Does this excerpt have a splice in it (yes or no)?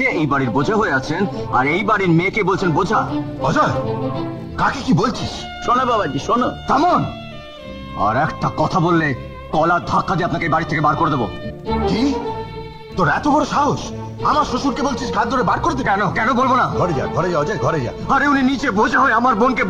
no